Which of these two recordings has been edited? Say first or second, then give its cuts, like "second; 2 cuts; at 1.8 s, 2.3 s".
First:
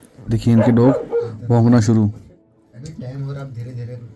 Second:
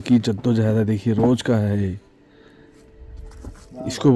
first; 1 cut; at 2.5 s